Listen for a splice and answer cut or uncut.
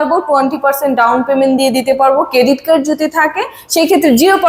uncut